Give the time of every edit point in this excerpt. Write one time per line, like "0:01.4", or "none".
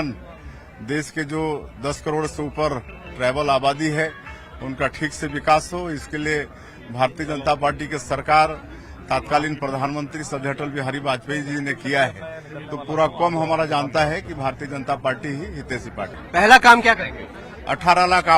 0:16.2